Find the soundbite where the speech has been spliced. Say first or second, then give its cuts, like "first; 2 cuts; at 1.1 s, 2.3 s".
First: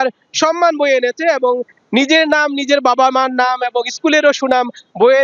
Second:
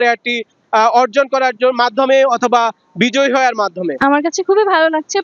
second; 1 cut; at 4.0 s